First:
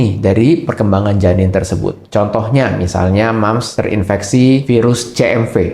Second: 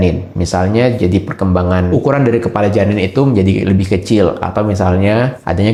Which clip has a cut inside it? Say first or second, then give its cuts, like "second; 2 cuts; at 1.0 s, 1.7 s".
first; 1 cut; at 2.0 s